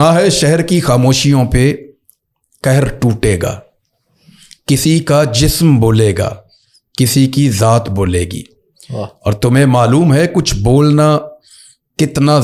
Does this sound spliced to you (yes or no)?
no